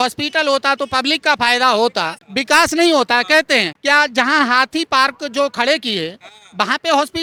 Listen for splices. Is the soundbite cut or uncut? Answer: uncut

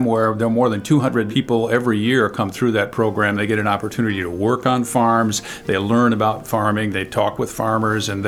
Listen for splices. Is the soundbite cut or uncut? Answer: cut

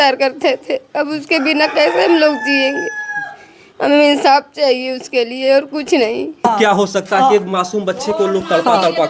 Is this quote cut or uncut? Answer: cut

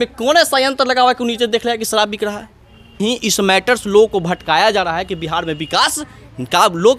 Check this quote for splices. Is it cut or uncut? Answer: uncut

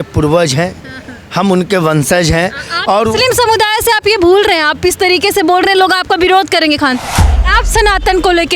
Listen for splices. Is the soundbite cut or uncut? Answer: cut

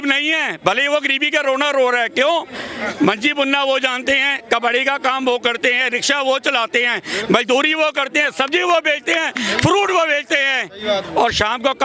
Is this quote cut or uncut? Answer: uncut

